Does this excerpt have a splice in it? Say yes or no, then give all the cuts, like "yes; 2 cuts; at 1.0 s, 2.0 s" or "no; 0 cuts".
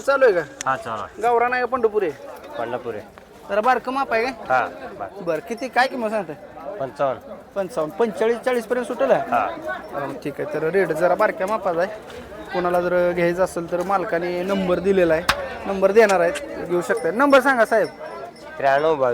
no; 0 cuts